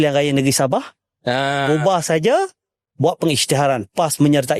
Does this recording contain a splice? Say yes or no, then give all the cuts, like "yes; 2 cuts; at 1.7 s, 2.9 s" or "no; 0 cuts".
no; 0 cuts